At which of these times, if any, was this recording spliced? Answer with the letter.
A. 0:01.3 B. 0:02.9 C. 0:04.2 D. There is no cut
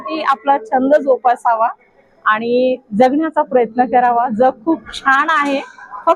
D